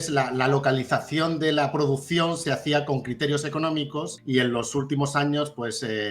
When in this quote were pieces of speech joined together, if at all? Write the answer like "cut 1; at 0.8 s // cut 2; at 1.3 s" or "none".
cut 1; at 4.2 s